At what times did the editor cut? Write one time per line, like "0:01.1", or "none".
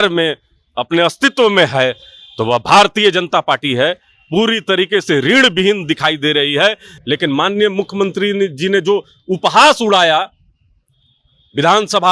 0:06.9